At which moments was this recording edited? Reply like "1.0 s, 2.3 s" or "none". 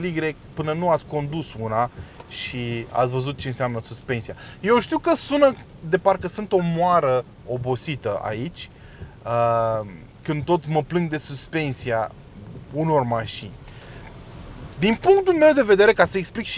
none